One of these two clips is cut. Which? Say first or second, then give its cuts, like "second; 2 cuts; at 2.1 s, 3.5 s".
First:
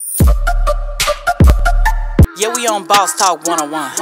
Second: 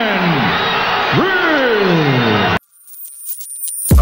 second; 1 cut; at 2.8 s